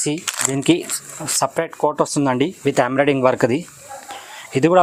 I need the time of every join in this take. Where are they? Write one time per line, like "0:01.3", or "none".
none

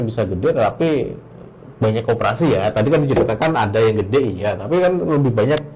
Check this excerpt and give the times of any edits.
none

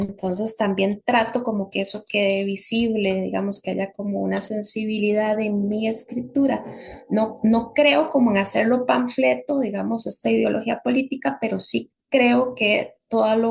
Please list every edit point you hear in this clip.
none

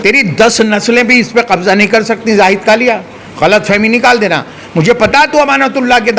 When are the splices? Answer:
none

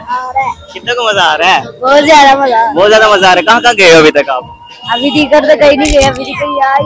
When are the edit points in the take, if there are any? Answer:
none

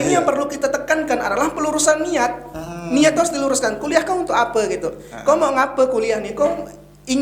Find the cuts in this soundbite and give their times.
none

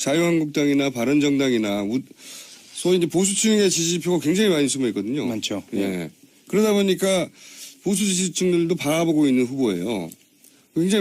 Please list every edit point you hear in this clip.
0:03.1

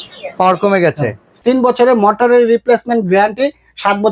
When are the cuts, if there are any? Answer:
0:01.4

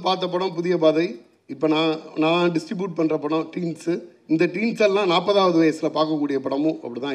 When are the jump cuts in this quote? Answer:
none

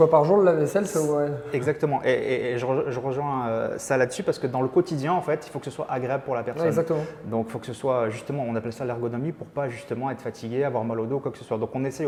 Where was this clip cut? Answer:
none

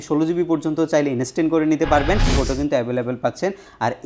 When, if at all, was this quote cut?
0:02.3

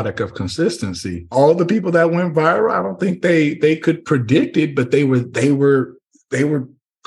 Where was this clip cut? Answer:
0:01.3

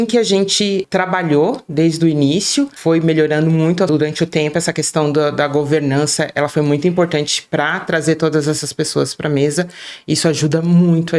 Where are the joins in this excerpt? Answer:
0:03.9

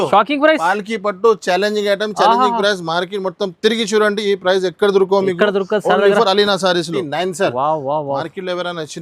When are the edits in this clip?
0:07.0

